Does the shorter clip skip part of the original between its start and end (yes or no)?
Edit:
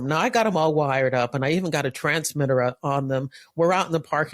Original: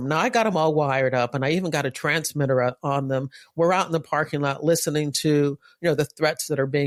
no